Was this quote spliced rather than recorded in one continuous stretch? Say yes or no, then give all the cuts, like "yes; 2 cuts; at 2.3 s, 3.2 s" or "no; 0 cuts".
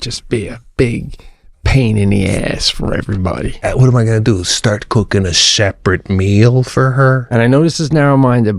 yes; 2 cuts; at 3.6 s, 7.2 s